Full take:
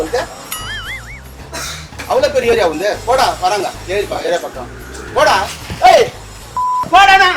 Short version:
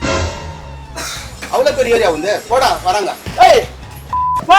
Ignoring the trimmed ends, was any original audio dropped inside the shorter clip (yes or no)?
yes